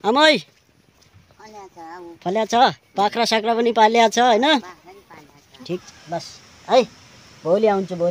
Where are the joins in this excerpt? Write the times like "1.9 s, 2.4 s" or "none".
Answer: 5.8 s